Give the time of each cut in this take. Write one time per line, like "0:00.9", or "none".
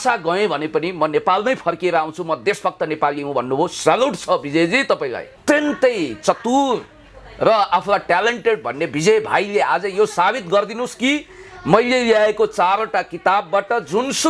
0:05.3